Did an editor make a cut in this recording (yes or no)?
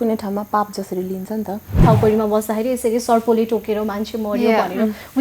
yes